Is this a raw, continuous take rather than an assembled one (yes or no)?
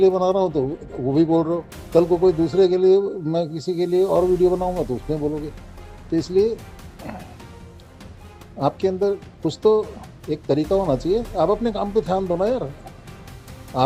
yes